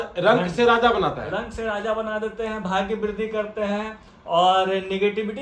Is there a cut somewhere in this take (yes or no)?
no